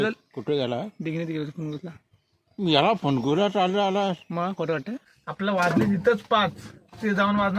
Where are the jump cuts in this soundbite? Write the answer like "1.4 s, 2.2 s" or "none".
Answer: 5.0 s